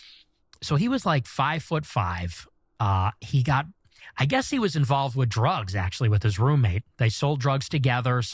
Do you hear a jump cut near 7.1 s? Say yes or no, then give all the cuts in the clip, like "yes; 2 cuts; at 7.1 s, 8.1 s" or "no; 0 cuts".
yes; 1 cut; at 7.1 s